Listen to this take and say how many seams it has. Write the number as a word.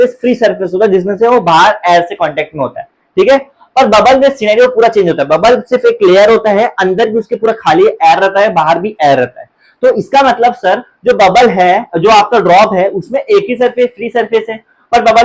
zero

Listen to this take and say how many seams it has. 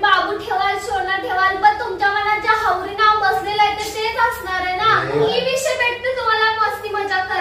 one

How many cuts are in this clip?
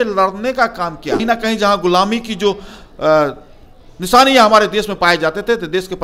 one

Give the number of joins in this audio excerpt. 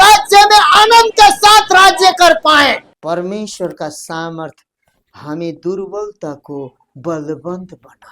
one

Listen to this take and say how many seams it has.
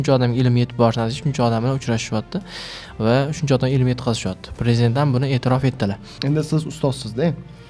one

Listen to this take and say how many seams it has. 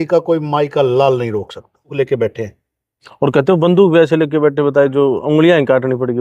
one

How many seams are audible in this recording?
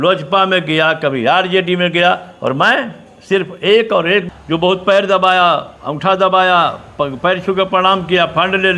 one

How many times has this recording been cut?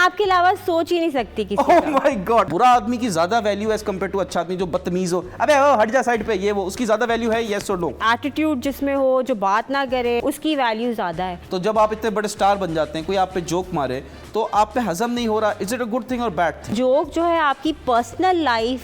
five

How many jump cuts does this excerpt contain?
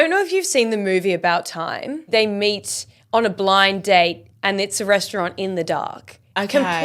one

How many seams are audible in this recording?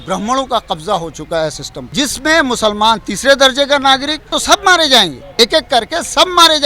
three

